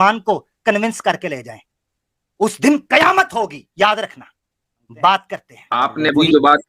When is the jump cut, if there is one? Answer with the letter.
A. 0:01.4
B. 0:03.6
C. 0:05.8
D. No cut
C